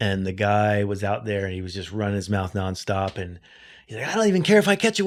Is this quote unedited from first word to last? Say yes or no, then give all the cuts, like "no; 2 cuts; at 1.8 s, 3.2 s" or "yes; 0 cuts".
yes; 0 cuts